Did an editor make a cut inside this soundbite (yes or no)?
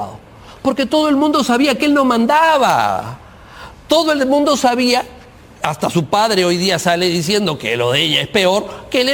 no